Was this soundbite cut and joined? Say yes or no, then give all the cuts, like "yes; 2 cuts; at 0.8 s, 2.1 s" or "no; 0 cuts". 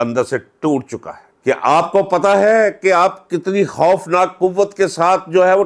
yes; 1 cut; at 1.3 s